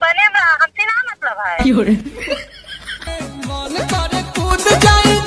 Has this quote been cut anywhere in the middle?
no; 0 cuts

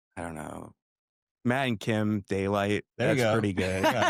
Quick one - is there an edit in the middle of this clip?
no; 0 cuts

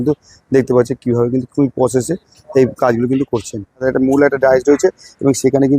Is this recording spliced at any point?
yes; 1 cut; at 3.9 s

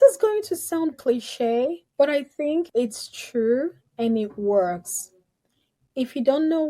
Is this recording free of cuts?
no; 1 cut; at 0.9 s

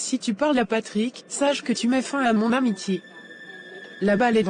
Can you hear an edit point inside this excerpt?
no; 0 cuts

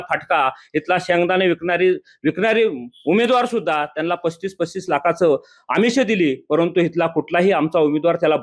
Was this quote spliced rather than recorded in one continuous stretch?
no; 0 cuts

